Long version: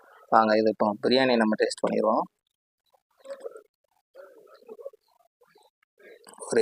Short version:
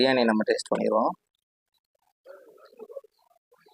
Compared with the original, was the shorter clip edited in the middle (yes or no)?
yes